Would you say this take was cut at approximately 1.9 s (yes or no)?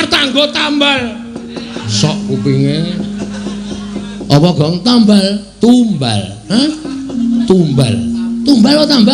yes